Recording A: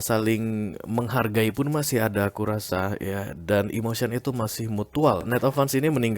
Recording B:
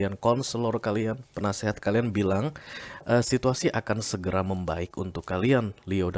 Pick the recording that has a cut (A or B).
A